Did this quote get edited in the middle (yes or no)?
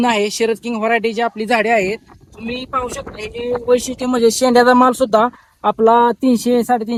no